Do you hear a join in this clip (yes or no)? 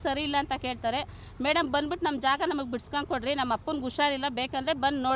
no